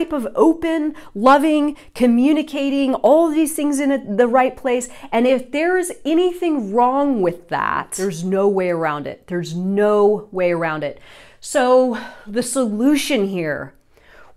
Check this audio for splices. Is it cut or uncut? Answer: cut